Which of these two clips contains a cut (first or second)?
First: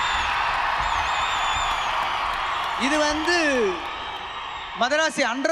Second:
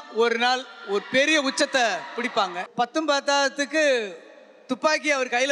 second